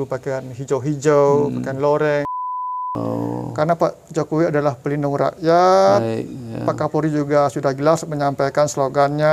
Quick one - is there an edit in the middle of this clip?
yes; 1 cut; at 2.8 s

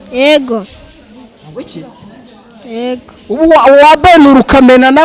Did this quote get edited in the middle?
no; 0 cuts

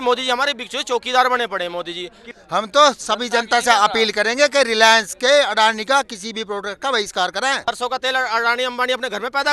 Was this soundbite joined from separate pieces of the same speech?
yes; 2 cuts; at 2.3 s, 7.7 s

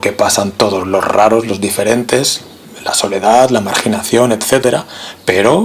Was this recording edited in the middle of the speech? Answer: no; 0 cuts

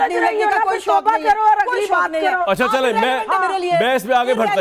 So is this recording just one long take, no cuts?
yes; 0 cuts

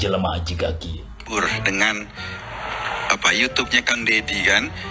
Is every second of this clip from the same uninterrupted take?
no; 1 cut; at 1.3 s

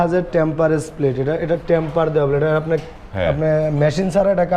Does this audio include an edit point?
no; 0 cuts

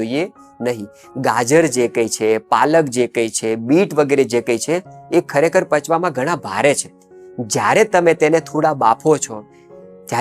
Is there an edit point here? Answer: no; 0 cuts

